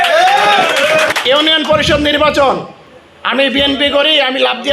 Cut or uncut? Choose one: cut